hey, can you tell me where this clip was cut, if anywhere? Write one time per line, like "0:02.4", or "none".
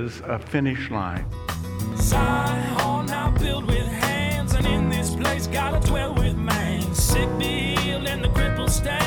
0:01.2